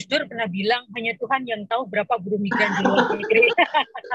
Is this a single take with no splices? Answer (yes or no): yes